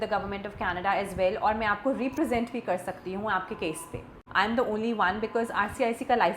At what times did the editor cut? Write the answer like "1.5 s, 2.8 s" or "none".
4.2 s